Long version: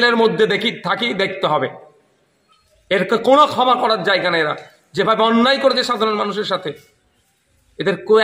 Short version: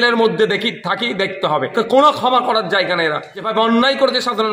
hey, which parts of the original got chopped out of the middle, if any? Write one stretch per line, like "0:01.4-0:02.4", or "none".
0:01.7-0:03.1
0:04.7-0:05.0